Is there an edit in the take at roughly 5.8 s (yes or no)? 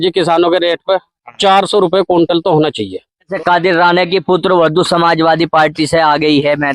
no